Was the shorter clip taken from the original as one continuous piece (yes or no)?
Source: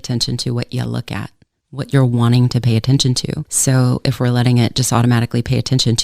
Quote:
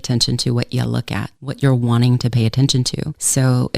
no